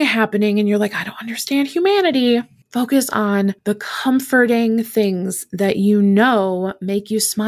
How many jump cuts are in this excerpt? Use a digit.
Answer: 2